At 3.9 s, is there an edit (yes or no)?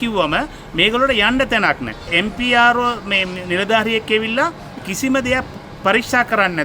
no